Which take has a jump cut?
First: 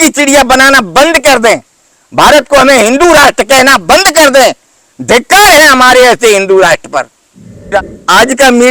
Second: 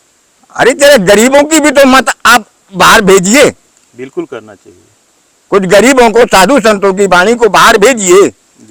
first; 1 cut; at 7.6 s

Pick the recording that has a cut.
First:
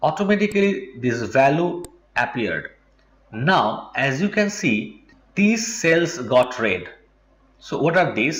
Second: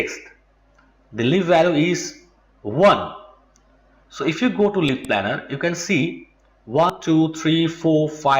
second; 1 cut; at 6.9 s

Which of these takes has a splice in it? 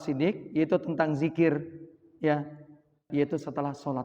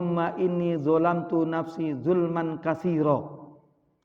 first; 1 cut; at 3.0 s

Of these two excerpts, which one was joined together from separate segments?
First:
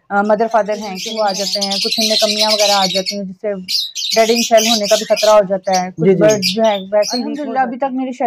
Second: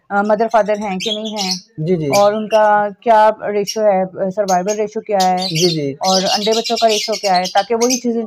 first; 2 cuts; at 1.0 s, 7.3 s

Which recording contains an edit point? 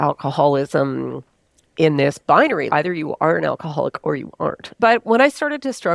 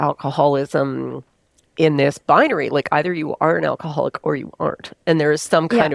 first; 2 cuts; at 2.7 s, 4.7 s

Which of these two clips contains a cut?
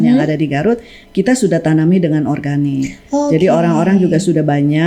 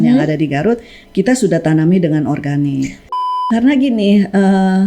second; 1 cut; at 3.3 s

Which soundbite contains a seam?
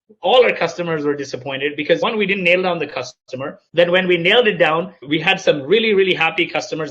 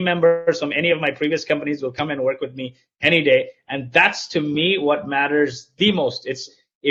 first; 3 cuts; at 2.0 s, 3.6 s, 5.0 s

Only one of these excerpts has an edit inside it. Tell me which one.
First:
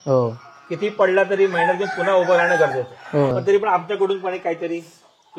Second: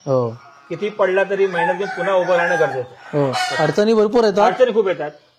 first; 1 cut; at 3.3 s

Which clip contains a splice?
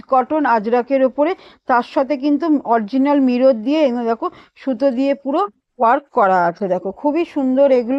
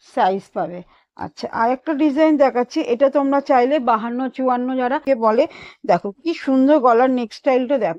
second; 1 cut; at 5.0 s

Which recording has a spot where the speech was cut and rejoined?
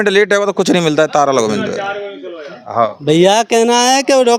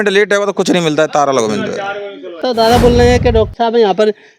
second; 1 cut; at 2.4 s

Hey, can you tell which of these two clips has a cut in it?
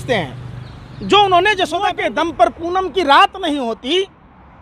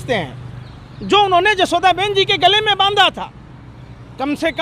first; 1 cut; at 1.8 s

